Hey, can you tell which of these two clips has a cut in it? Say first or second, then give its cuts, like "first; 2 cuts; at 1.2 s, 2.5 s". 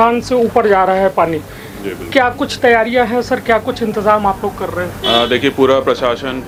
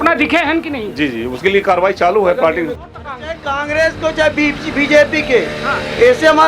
second; 1 cut; at 2.8 s